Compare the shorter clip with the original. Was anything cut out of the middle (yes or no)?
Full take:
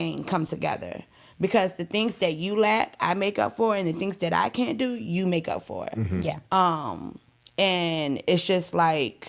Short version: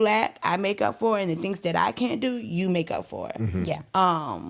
no